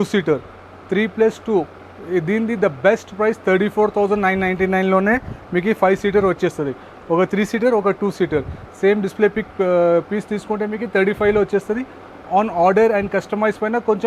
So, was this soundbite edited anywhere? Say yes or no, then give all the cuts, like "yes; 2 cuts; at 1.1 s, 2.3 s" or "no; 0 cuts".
no; 0 cuts